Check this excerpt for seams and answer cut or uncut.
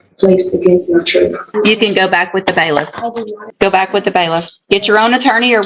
cut